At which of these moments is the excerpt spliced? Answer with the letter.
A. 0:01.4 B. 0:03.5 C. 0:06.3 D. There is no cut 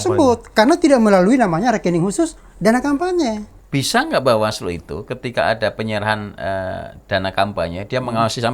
B